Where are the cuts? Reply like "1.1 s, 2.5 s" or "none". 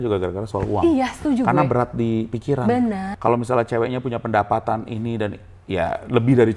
3.1 s